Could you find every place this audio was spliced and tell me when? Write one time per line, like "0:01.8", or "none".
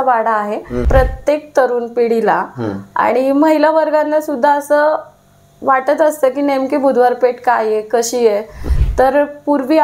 0:00.8
0:08.7